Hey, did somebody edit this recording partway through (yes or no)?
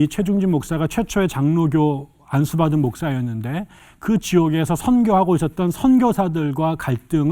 no